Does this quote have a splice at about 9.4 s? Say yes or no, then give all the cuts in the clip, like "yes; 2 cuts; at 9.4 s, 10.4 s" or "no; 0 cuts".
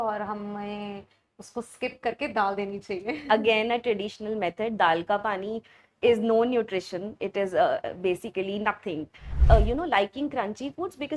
yes; 1 cut; at 9.4 s